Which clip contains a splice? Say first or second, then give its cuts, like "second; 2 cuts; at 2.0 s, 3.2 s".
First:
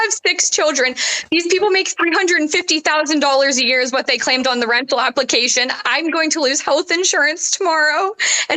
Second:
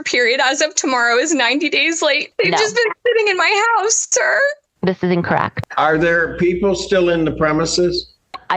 second; 2 cuts; at 2.3 s, 5.5 s